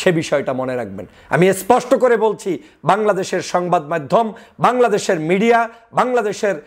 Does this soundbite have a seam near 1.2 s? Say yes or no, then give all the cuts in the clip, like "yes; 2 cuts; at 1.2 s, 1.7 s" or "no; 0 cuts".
no; 0 cuts